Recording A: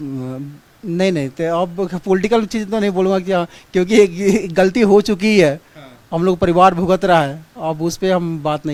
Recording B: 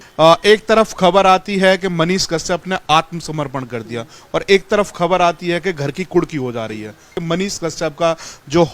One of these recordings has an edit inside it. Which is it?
B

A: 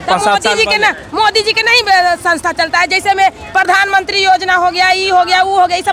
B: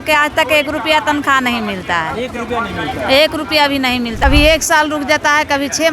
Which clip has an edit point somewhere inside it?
B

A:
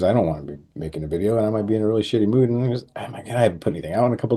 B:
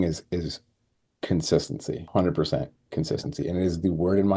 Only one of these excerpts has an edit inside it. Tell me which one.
B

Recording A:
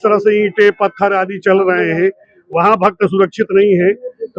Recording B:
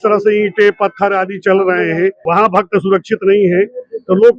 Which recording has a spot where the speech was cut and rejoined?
B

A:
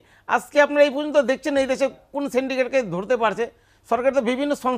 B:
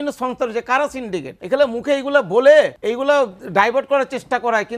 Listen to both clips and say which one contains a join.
B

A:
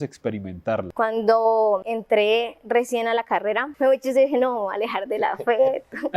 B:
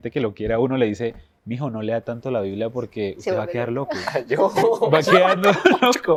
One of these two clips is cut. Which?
A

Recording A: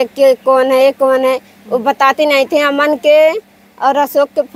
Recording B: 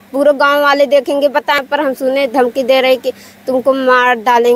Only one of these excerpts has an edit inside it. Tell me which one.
B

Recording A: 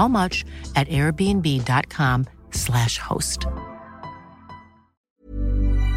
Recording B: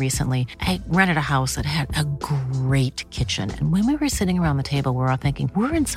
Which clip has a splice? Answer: A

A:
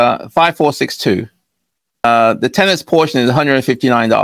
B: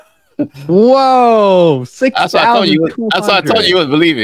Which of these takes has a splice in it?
A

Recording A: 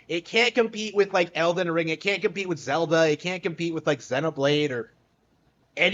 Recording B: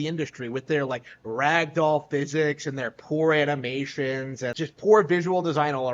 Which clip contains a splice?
B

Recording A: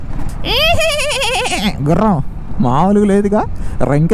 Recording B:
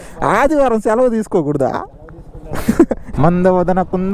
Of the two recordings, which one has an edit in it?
B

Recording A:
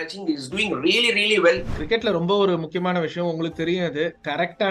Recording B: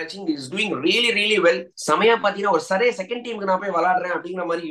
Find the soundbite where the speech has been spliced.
A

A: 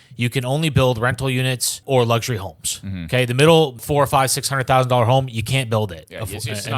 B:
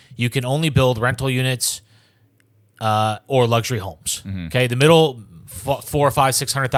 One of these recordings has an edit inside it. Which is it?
A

